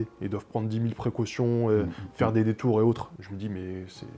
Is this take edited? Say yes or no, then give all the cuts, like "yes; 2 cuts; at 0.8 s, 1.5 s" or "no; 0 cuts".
no; 0 cuts